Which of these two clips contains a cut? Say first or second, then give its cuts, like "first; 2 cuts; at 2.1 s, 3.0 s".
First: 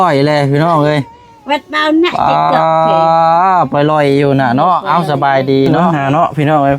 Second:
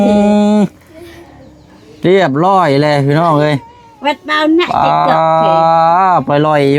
first; 1 cut; at 5.8 s